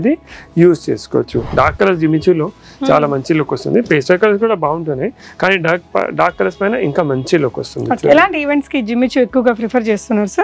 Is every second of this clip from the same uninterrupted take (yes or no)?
no